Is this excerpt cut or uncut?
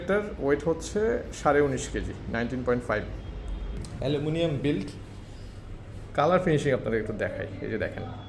cut